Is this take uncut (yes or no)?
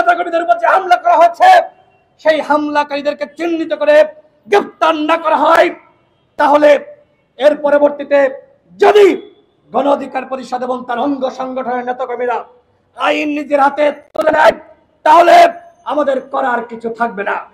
yes